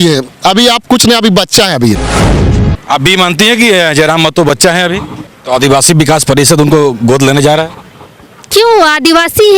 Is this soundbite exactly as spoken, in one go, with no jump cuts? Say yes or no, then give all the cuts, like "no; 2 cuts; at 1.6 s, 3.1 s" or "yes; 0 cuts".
no; 2 cuts; at 2.3 s, 5.3 s